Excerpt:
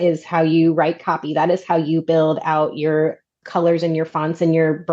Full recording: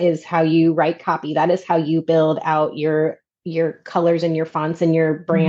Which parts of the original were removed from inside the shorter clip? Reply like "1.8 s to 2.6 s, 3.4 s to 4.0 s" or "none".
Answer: 3.4 s to 3.8 s